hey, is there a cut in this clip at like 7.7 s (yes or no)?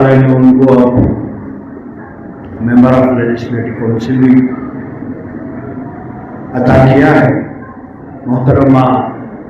no